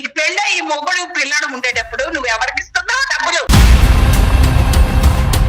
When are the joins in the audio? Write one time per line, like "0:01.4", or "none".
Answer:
0:03.5